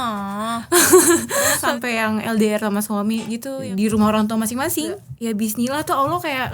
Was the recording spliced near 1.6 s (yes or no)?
yes